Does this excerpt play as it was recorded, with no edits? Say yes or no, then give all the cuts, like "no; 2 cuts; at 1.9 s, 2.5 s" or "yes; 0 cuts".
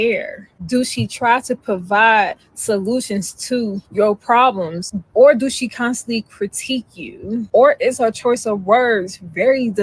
yes; 0 cuts